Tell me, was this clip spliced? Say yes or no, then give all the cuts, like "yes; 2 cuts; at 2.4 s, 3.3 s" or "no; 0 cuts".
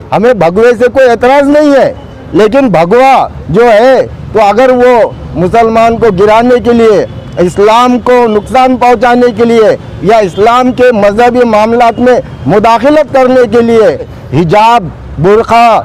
yes; 1 cut; at 14.2 s